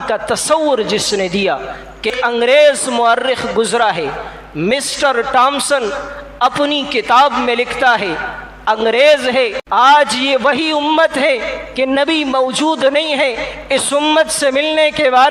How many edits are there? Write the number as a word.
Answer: two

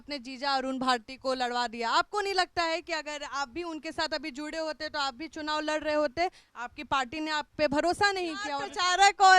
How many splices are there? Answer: one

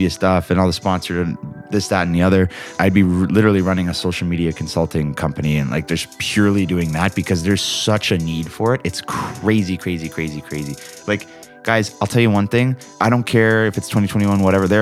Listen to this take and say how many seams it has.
three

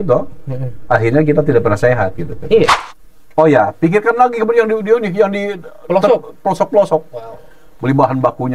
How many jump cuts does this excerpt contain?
one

